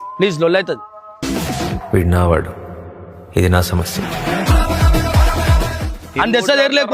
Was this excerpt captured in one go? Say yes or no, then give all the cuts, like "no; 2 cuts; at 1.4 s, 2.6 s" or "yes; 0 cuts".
no; 1 cut; at 5.9 s